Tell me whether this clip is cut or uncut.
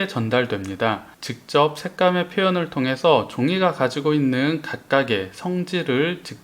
cut